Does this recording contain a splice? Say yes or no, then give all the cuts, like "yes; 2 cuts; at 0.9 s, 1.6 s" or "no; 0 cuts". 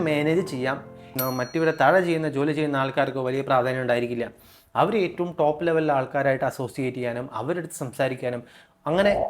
yes; 1 cut; at 1.1 s